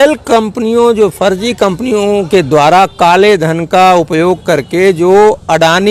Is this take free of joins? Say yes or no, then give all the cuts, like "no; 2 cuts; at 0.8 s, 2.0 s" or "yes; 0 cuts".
yes; 0 cuts